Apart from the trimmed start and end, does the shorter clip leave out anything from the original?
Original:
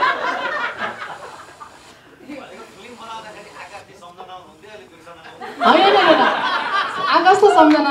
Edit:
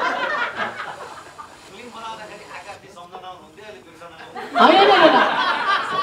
yes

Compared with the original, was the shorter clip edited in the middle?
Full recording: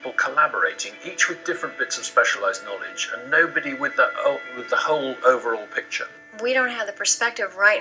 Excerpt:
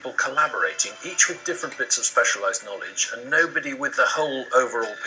yes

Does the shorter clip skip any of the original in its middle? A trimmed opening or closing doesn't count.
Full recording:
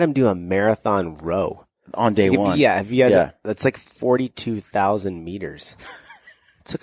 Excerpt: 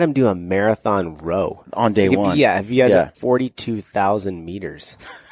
yes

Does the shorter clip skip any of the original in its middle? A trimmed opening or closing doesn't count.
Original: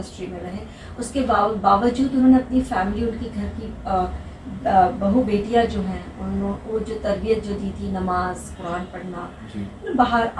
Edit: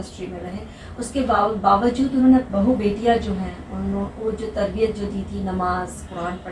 yes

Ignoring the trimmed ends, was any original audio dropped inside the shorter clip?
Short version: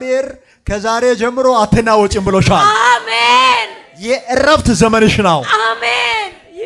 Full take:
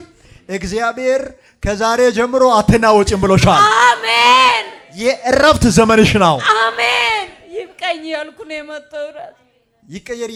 no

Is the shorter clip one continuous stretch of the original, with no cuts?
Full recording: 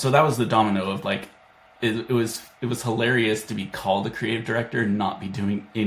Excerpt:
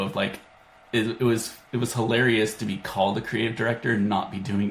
yes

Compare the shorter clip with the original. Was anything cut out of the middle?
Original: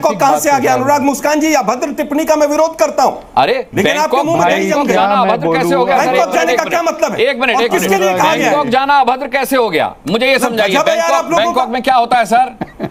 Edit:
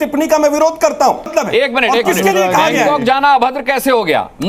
yes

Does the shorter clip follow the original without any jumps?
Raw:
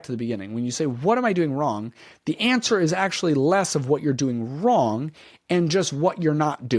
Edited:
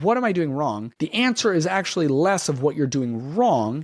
no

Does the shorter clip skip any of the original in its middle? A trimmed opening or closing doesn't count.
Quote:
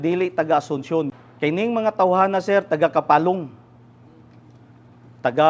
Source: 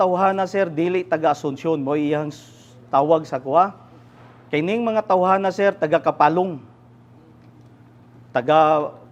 yes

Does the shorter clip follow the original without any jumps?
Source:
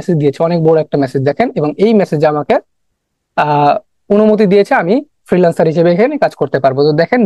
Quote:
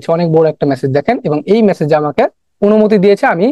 no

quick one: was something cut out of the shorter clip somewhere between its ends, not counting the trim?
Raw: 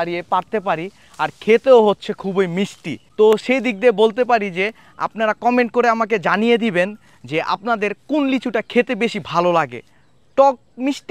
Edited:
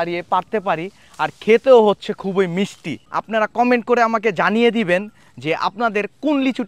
yes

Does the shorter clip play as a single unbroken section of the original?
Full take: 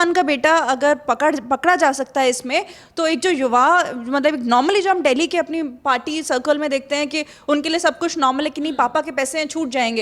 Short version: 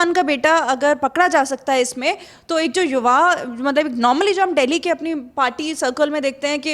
no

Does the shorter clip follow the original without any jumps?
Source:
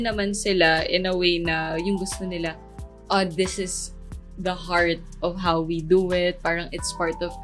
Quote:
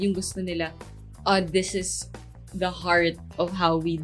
yes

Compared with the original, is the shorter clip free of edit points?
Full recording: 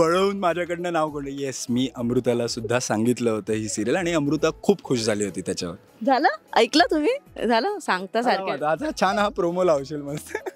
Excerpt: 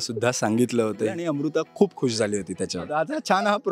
no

